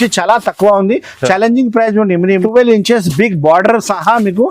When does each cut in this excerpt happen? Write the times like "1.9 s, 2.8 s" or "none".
2.4 s